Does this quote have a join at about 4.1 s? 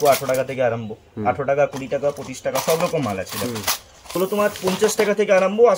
yes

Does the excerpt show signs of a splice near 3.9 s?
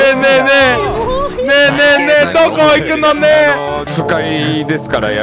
yes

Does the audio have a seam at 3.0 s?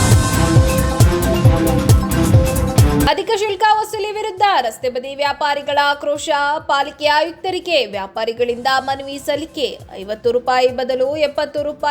yes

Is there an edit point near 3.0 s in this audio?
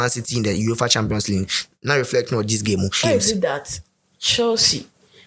yes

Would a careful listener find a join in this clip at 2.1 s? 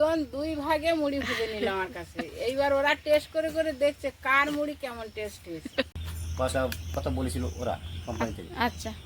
no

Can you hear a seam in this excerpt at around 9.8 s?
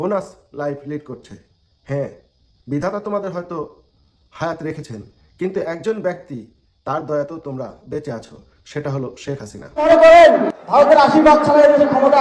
yes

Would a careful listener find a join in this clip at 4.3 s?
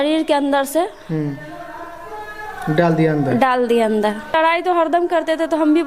yes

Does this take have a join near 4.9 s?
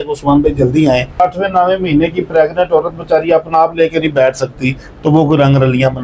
no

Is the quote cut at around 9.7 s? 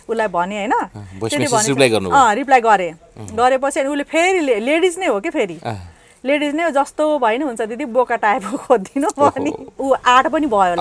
yes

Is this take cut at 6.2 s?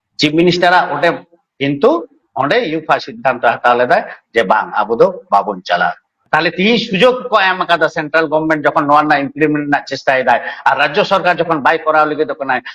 yes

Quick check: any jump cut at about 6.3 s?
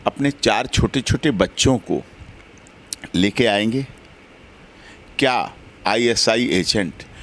no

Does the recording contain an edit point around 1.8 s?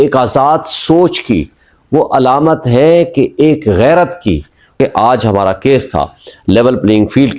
no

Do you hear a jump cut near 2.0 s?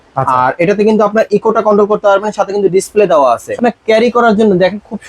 no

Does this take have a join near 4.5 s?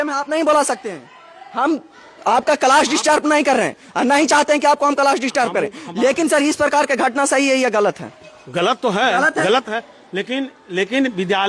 no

